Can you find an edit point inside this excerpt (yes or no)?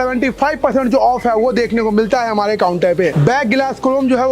yes